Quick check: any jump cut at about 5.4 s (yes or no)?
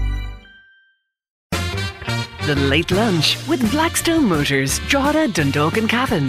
no